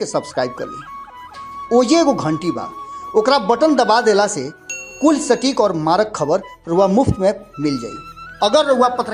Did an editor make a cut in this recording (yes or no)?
no